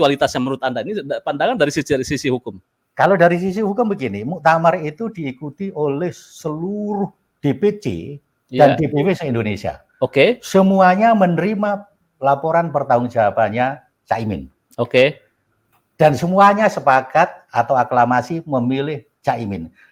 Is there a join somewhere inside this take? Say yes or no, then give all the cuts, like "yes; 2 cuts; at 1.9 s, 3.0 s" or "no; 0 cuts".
no; 0 cuts